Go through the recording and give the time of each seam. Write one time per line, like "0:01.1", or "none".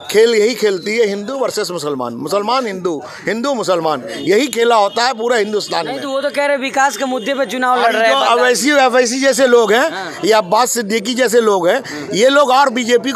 none